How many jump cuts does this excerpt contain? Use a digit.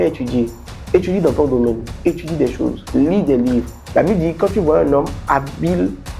1